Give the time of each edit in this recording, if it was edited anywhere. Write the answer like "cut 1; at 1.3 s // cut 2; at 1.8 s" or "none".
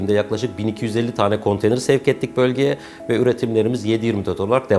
none